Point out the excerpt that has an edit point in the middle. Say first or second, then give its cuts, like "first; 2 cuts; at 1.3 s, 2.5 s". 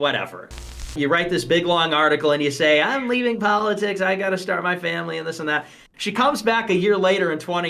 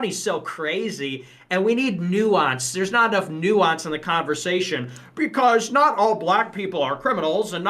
first; 2 cuts; at 0.9 s, 5.8 s